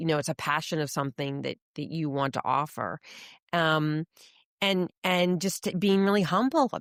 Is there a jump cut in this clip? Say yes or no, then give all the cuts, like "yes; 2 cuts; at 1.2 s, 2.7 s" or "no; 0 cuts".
no; 0 cuts